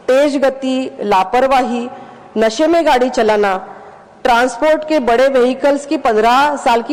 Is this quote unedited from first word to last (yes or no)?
yes